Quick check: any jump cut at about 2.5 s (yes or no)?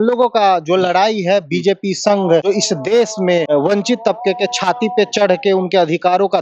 yes